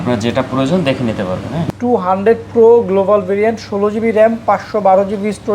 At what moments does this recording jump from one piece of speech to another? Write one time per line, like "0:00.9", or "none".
0:01.6